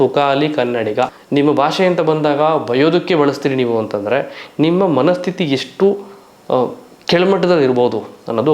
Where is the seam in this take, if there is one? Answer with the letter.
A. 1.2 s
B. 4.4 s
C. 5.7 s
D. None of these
A